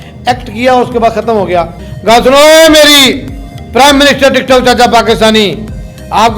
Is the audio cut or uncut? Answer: cut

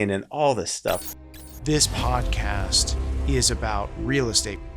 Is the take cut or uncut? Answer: cut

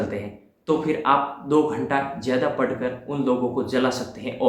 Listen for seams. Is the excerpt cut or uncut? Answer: uncut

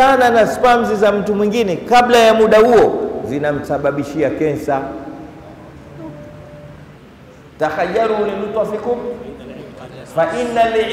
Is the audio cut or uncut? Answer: cut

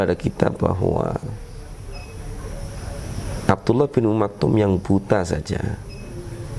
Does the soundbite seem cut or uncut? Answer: uncut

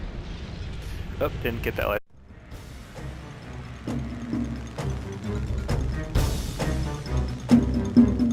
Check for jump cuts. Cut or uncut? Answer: uncut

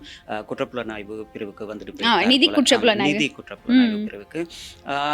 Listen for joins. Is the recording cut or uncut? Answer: uncut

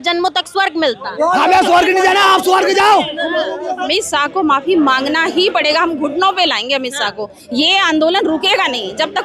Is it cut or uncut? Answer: cut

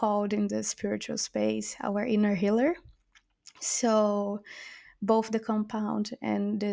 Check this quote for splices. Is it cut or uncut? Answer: uncut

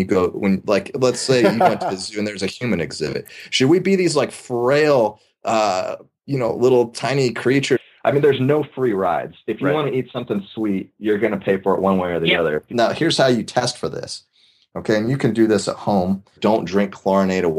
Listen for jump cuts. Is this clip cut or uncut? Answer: cut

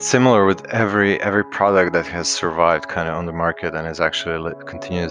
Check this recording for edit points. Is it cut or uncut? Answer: uncut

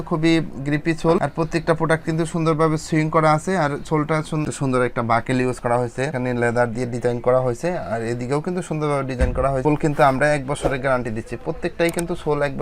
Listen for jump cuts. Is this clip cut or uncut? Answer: cut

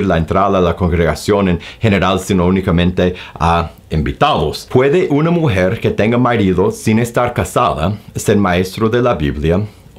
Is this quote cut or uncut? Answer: cut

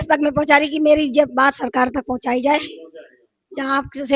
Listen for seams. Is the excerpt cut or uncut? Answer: uncut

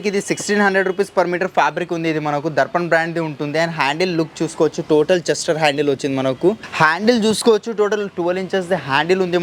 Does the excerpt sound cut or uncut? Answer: cut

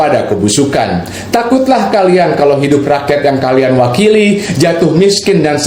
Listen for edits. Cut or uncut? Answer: uncut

